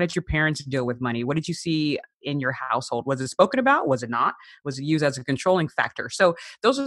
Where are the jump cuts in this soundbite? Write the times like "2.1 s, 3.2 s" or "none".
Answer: none